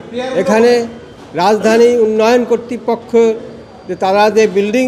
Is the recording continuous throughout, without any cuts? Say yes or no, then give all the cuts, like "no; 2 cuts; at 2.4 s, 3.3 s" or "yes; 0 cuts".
yes; 0 cuts